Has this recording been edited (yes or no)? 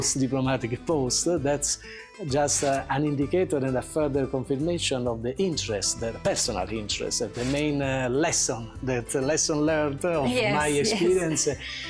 yes